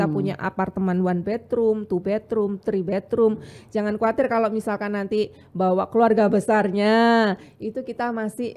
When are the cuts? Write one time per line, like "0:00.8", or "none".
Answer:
none